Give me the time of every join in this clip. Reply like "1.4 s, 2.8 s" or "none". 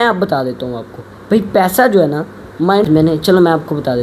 2.9 s